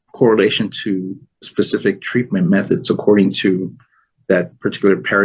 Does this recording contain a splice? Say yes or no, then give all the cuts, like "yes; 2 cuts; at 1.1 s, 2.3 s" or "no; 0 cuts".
no; 0 cuts